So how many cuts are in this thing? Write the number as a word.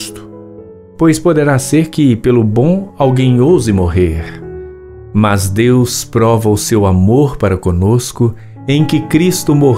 zero